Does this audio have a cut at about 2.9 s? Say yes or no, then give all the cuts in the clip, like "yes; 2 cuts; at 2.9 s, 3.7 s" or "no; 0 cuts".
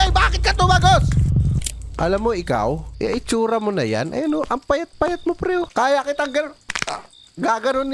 yes; 3 cuts; at 1.6 s, 2.9 s, 5.7 s